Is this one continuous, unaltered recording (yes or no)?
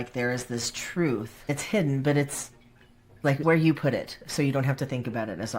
no